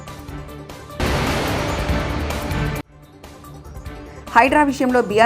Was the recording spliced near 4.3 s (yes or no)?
no